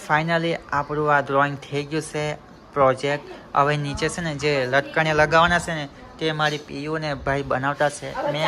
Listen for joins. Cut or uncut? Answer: uncut